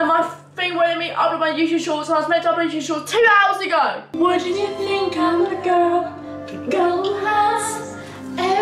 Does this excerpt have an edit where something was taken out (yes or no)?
yes